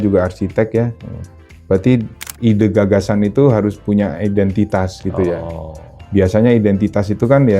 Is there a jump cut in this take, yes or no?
yes